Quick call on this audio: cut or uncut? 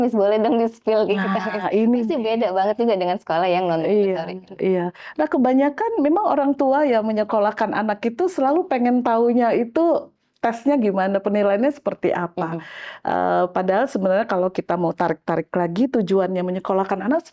uncut